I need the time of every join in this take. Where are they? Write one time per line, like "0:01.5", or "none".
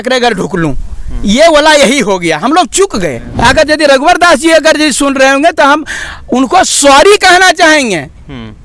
0:03.2